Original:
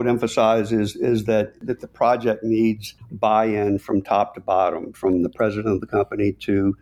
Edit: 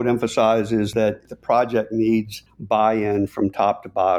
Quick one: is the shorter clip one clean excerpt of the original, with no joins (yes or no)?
no